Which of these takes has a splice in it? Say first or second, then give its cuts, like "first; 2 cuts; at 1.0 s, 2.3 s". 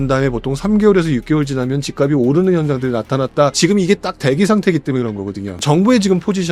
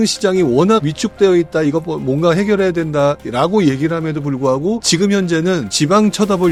first; 2 cuts; at 3.5 s, 5.6 s